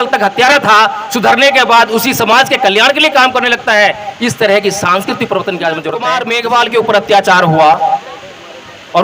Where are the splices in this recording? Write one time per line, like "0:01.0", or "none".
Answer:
0:06.1